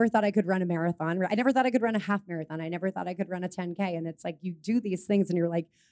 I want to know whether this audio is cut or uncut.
uncut